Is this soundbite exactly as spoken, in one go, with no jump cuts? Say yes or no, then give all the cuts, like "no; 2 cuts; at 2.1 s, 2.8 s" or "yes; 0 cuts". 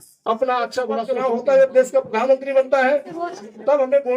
no; 1 cut; at 1.0 s